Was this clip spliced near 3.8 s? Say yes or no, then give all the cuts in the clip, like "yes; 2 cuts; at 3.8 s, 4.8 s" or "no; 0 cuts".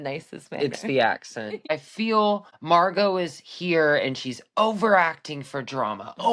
no; 2 cuts; at 1.7 s, 2.5 s